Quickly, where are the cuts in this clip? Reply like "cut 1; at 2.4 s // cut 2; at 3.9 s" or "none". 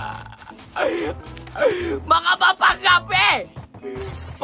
cut 1; at 1.1 s